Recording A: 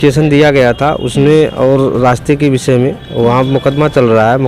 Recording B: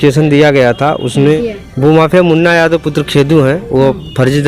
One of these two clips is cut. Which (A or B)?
B